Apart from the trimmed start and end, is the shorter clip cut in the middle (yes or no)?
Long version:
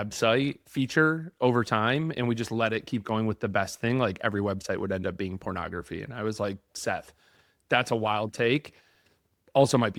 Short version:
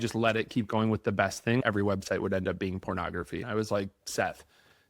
yes